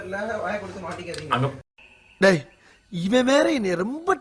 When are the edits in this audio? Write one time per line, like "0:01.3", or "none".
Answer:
none